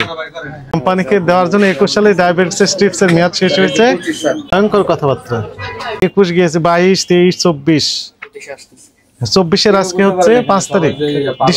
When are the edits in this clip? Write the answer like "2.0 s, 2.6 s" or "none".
0.7 s, 4.4 s, 6.0 s